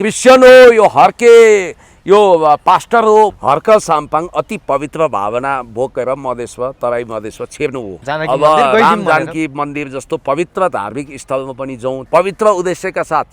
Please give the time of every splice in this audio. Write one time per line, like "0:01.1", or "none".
0:03.4
0:08.0
0:12.0